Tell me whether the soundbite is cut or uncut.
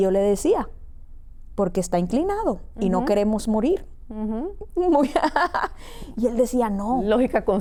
uncut